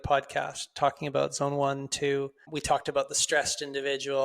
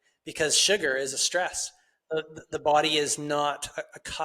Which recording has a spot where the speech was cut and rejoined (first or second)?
first